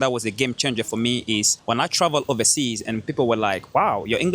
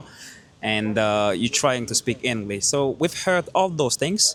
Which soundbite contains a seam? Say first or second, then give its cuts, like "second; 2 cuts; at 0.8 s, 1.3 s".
first; 1 cut; at 1.5 s